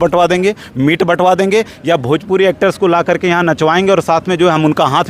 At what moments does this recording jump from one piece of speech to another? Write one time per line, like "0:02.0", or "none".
none